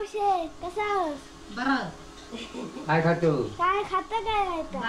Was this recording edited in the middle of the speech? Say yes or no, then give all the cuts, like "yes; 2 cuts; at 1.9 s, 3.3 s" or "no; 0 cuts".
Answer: no; 0 cuts